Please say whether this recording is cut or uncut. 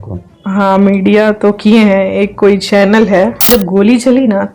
cut